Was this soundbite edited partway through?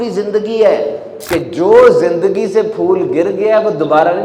yes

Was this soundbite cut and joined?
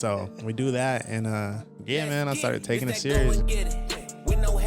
yes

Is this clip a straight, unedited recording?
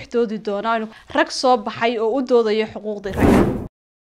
no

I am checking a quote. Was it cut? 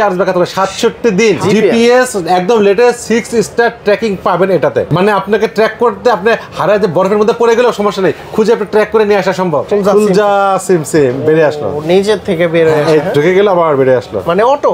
yes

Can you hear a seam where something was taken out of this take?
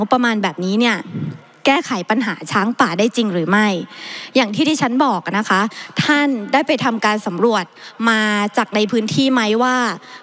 no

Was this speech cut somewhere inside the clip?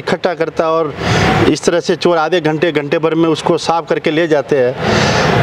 no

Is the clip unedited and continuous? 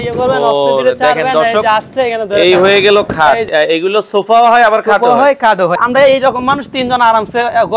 no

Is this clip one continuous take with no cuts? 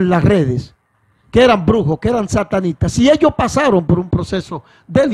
yes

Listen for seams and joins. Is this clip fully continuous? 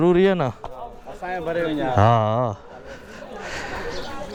yes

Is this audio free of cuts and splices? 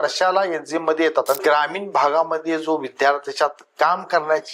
no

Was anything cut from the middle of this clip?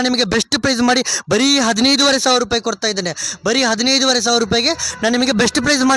no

